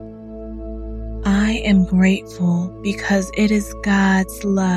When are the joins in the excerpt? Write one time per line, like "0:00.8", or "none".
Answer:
0:01.2